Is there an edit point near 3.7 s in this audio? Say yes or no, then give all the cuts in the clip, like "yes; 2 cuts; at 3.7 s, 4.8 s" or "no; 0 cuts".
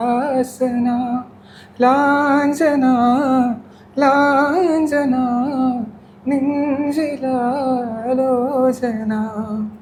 no; 0 cuts